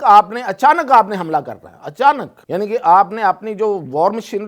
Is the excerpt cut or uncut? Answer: cut